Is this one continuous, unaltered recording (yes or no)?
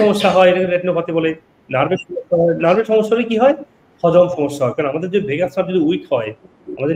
yes